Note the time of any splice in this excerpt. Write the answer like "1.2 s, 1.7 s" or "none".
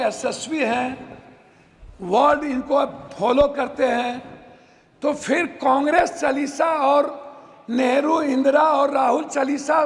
none